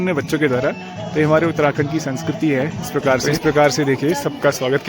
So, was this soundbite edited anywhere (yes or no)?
yes